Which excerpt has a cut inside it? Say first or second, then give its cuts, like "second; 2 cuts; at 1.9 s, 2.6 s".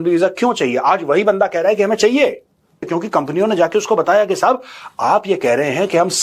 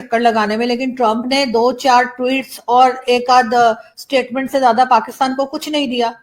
first; 1 cut; at 2.9 s